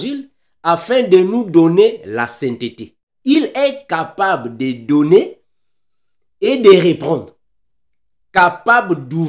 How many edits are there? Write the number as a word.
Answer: one